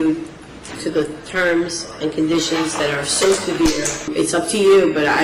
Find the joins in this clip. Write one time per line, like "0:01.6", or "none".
0:04.1